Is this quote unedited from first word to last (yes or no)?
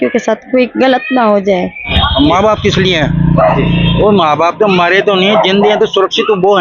no